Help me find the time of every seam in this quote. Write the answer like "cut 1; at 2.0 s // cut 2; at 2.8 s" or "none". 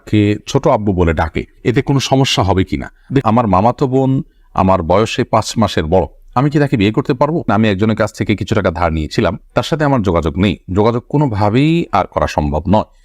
cut 1; at 3.2 s // cut 2; at 7.4 s